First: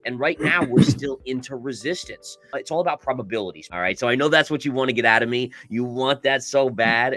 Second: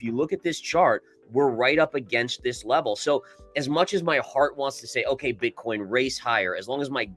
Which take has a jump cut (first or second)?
first